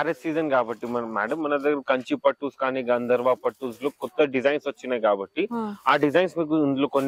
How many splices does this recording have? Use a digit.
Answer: 0